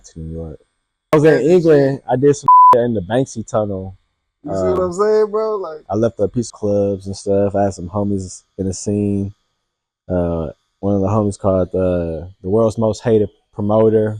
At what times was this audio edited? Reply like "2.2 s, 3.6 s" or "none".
1.1 s, 6.5 s